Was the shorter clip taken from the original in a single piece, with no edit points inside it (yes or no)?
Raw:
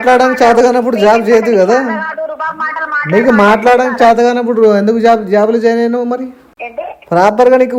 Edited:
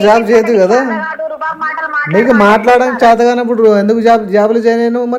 yes